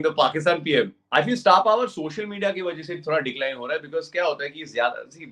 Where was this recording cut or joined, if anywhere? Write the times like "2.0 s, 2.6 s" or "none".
1.0 s